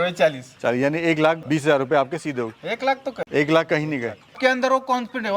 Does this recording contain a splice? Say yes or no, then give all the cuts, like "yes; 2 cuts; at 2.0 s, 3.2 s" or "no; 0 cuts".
yes; 3 cuts; at 1.4 s, 3.2 s, 4.4 s